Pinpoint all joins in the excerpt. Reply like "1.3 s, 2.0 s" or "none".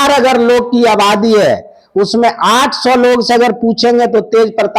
none